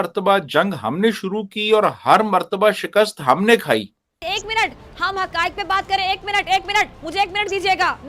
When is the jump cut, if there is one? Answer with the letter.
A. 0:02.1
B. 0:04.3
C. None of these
B